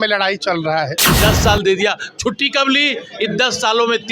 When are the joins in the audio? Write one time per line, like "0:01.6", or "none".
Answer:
0:01.0